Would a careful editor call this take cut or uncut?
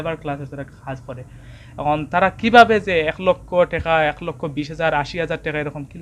uncut